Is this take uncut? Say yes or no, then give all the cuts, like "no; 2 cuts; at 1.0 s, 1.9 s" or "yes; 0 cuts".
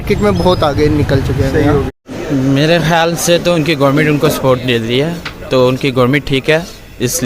no; 1 cut; at 2.0 s